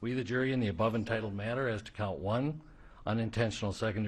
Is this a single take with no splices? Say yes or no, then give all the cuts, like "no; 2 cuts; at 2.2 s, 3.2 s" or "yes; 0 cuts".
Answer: yes; 0 cuts